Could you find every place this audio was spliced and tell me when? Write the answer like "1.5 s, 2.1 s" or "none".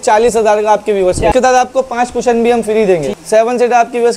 1.3 s, 3.1 s